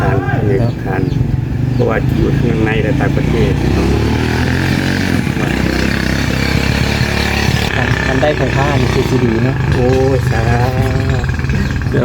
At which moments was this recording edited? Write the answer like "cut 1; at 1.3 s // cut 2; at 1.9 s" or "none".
cut 1; at 7.7 s